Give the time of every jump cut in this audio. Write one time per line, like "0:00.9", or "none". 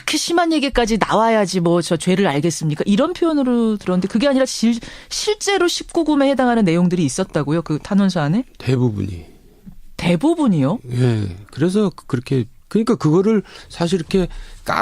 0:02.3